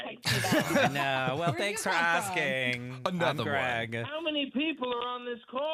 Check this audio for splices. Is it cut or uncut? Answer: uncut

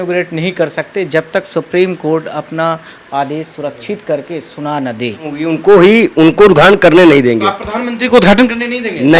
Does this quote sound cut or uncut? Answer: cut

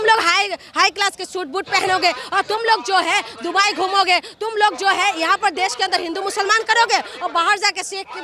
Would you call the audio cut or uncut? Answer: uncut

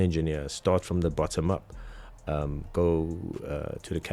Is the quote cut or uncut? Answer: uncut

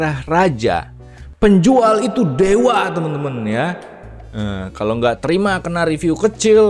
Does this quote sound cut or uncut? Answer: uncut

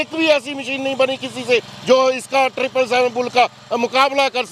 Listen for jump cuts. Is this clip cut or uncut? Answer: uncut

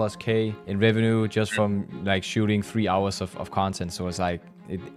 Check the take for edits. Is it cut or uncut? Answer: uncut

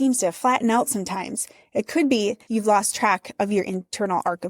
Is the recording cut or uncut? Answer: cut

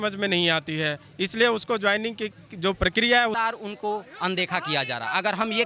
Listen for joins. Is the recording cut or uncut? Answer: cut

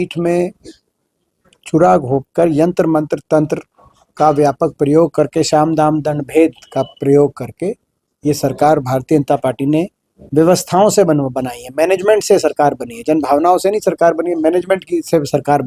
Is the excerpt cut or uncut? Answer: uncut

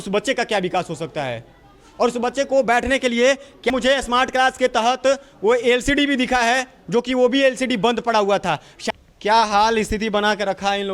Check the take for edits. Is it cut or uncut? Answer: cut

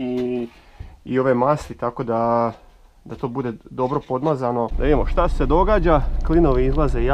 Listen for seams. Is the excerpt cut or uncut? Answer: cut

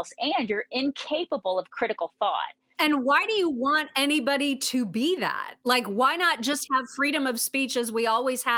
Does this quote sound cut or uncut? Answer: cut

